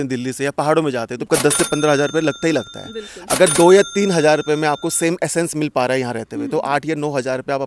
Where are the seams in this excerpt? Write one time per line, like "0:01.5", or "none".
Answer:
0:01.3